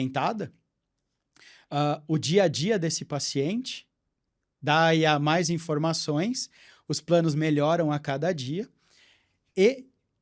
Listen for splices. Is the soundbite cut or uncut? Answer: uncut